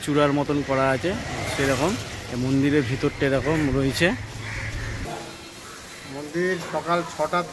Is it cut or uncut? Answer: cut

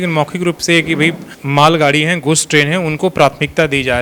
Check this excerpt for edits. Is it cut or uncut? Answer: uncut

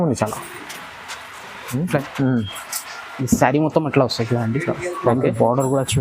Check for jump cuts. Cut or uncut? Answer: cut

